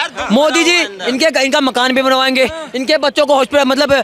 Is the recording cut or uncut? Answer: uncut